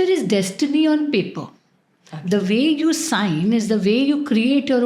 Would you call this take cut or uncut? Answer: uncut